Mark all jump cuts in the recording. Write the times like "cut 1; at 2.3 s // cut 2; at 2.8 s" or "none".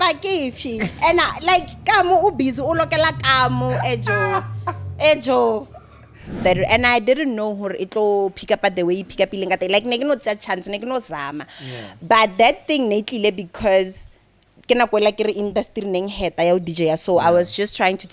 cut 1; at 6.4 s